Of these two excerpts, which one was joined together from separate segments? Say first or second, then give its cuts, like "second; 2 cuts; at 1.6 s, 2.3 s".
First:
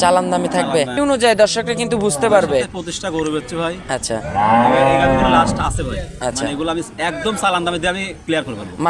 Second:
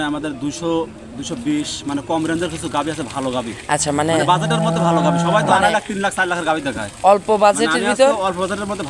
first; 1 cut; at 1.0 s